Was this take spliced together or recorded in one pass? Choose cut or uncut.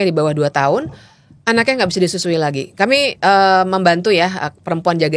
uncut